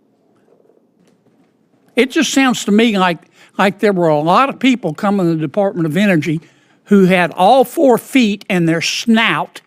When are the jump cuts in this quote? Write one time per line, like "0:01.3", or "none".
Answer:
0:01.0

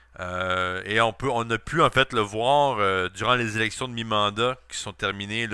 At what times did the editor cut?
0:03.2

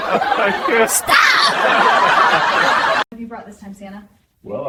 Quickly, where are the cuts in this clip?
none

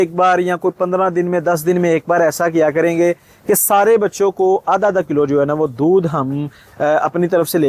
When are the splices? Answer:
none

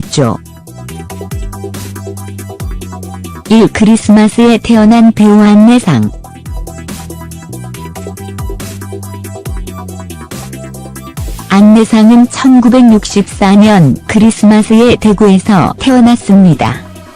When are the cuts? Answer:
0:05.3

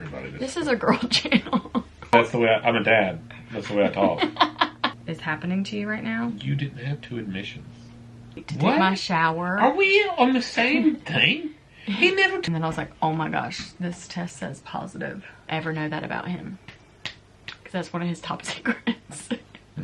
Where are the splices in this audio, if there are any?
0:02.1
0:05.0
0:08.5
0:12.5
0:15.5

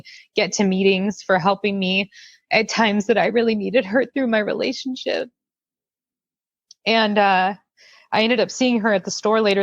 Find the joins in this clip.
none

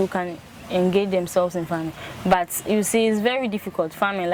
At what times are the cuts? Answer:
none

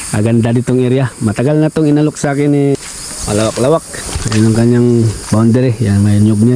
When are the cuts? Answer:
0:02.8

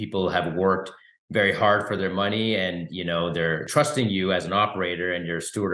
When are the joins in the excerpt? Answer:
0:03.7

